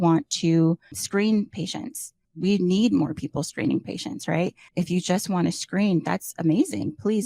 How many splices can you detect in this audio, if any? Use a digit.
1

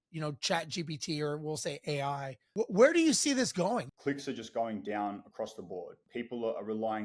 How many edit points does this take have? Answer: 3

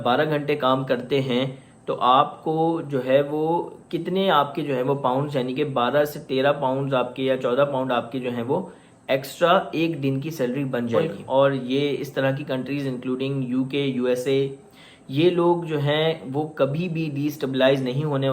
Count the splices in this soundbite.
1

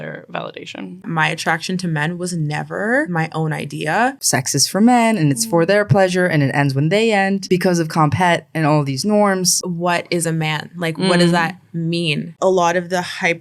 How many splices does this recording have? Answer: 5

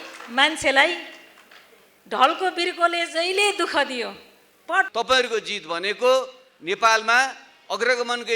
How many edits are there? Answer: 1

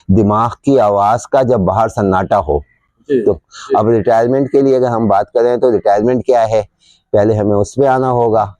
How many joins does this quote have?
1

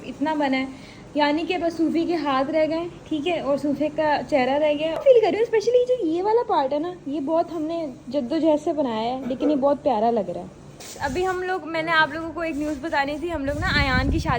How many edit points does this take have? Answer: 2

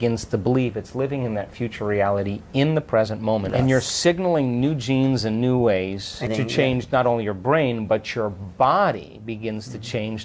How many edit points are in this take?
2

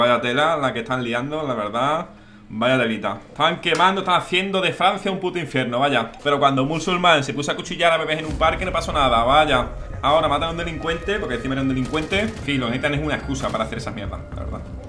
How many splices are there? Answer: 2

